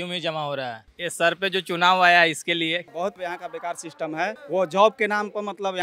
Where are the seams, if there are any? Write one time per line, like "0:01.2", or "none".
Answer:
0:00.8
0:02.9
0:04.4